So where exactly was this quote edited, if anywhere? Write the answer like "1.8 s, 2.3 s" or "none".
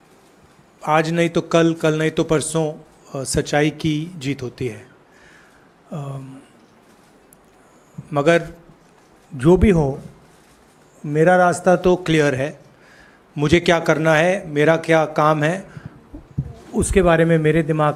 none